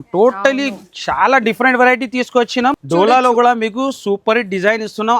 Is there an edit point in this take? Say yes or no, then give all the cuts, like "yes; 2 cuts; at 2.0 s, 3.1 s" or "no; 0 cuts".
yes; 1 cut; at 2.8 s